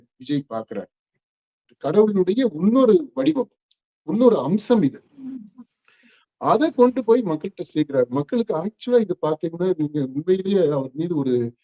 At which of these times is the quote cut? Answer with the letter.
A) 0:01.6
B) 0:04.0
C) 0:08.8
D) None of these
A